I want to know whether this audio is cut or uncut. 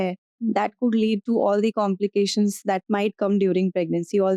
uncut